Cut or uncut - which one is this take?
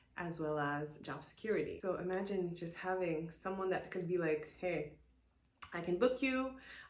cut